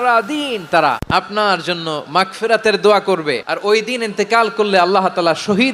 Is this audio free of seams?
no; 2 cuts; at 1.0 s, 3.5 s

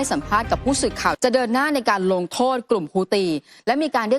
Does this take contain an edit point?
yes; 1 cut; at 1.2 s

